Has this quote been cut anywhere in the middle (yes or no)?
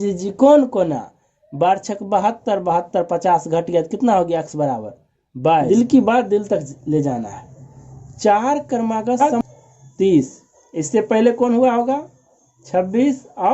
yes